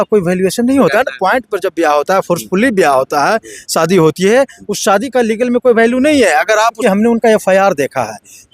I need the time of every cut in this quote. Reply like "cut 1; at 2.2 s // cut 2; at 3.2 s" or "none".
cut 1; at 0.9 s // cut 2; at 6.8 s